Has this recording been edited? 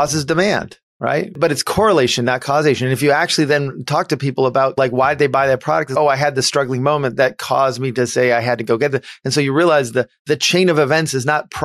yes; 1 cut; at 1.4 s

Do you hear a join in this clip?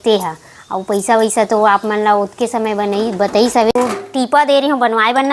yes; 1 cut; at 3.7 s

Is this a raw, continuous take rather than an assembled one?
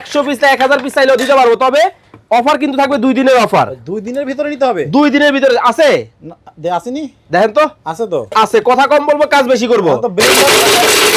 yes; 0 cuts

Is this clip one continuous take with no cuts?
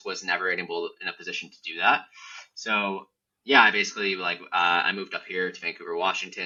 yes; 0 cuts

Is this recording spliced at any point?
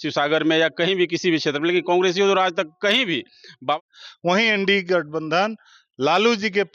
yes; 1 cut; at 3.8 s

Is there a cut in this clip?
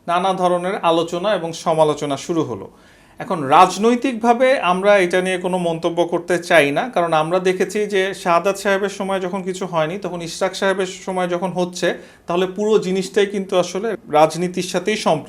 yes; 1 cut; at 13.9 s

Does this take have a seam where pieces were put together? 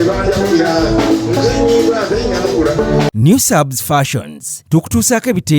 yes; 1 cut; at 3.1 s

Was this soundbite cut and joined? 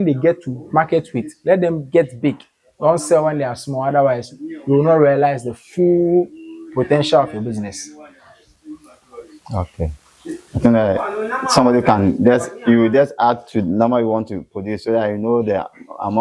no; 0 cuts

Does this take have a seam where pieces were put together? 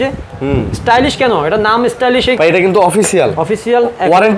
yes; 1 cut; at 2.4 s

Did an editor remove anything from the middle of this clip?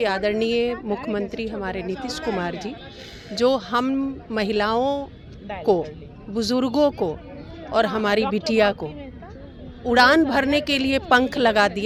no; 0 cuts

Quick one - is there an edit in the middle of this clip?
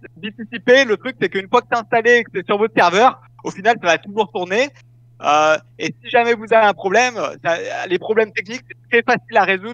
no; 0 cuts

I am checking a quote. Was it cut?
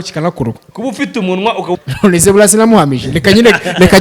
yes; 1 cut; at 1.8 s

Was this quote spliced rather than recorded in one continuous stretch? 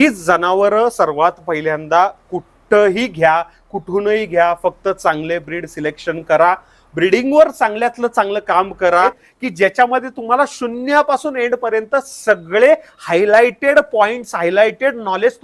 yes; 1 cut; at 8.9 s

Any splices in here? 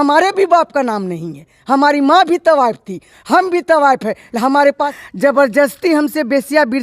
yes; 1 cut; at 4.9 s

